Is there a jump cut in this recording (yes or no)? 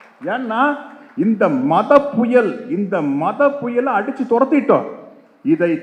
no